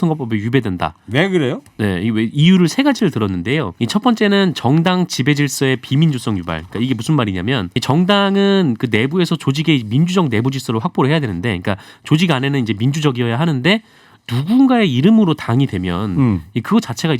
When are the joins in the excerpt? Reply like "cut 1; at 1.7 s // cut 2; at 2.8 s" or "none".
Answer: cut 1; at 3.7 s // cut 2; at 7.7 s